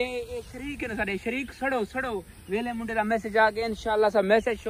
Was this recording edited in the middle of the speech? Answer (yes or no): no